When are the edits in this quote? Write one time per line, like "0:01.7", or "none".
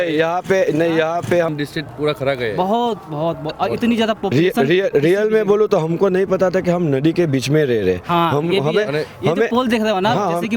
0:01.5